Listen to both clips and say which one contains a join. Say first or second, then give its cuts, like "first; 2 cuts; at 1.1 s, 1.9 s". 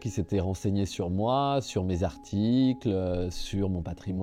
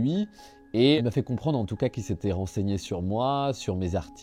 second; 1 cut; at 1.0 s